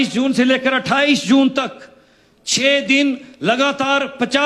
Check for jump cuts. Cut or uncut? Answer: uncut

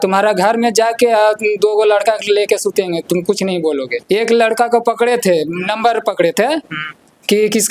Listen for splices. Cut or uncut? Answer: cut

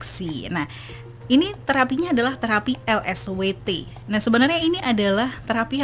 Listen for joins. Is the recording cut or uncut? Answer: uncut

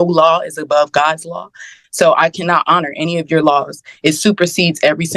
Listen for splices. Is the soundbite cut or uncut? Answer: uncut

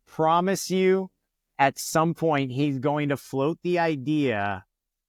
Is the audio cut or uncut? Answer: uncut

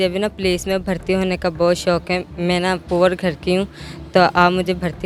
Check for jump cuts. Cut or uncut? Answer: uncut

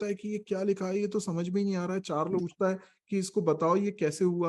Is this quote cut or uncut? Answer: cut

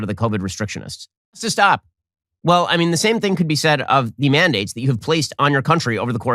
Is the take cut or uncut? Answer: cut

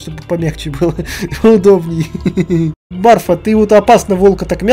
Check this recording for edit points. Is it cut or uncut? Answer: cut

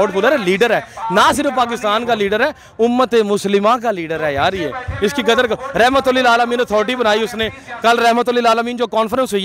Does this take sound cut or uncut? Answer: uncut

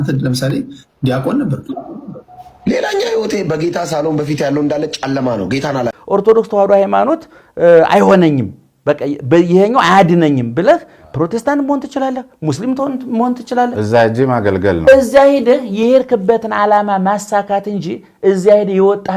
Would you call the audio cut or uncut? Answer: cut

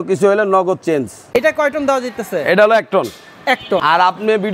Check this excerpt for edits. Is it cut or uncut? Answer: cut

